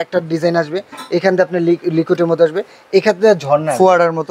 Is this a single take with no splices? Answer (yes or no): yes